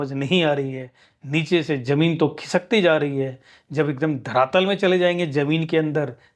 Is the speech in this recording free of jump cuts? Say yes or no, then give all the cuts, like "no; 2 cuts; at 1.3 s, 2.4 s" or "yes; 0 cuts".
yes; 0 cuts